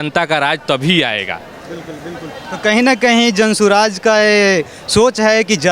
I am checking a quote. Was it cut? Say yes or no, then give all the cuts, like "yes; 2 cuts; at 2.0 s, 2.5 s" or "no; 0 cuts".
no; 0 cuts